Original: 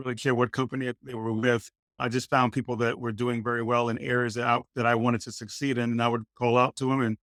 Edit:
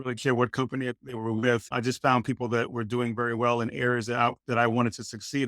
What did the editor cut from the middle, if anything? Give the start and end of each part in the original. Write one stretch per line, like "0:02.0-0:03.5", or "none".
0:01.7-0:02.0